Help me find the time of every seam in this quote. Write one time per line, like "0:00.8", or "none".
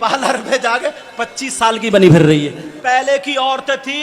0:02.8